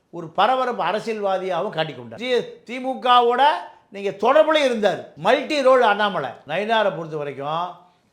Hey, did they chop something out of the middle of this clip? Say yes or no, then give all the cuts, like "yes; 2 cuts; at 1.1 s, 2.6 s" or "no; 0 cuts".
yes; 3 cuts; at 2.2 s, 5.1 s, 6.4 s